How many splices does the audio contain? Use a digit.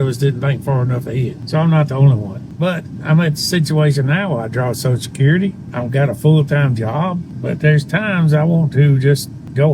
1